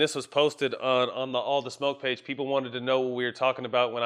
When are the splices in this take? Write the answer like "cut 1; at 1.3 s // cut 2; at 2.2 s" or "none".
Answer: none